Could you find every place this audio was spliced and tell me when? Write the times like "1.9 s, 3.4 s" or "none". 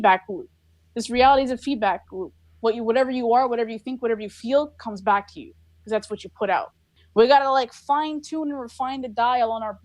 7.0 s